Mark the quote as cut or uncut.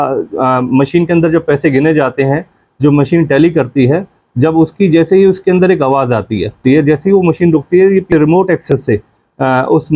cut